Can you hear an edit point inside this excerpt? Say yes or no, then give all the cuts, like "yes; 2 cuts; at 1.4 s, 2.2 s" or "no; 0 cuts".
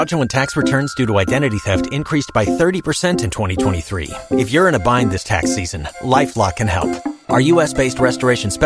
no; 0 cuts